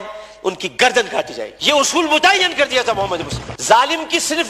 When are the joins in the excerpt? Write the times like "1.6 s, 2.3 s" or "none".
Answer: 3.5 s

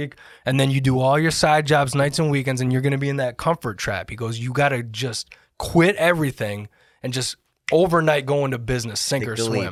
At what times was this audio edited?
none

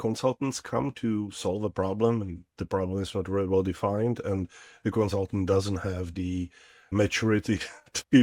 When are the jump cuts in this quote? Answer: 6.9 s

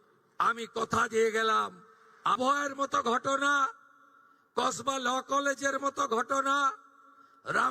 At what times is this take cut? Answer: 2.4 s

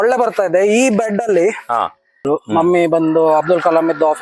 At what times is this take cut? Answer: 2.1 s

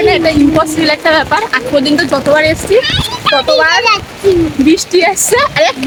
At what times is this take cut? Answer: none

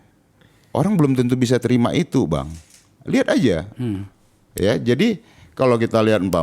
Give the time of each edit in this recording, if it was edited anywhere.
none

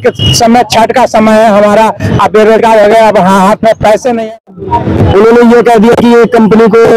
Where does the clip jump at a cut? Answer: 4.6 s

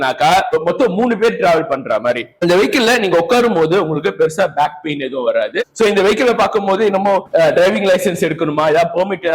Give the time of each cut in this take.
2.6 s, 5.6 s

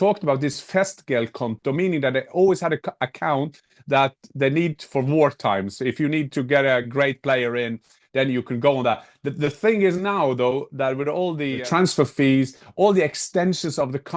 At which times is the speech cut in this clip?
11.6 s

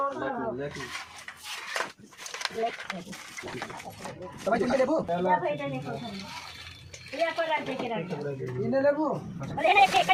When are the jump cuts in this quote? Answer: none

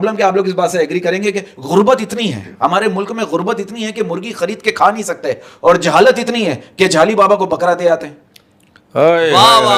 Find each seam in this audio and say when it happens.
none

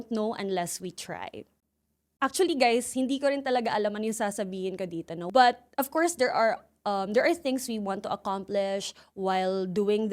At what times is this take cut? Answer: none

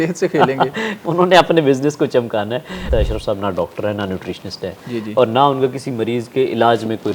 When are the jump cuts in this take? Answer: 2.9 s

